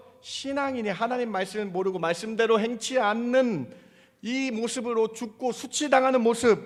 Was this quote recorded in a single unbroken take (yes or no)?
yes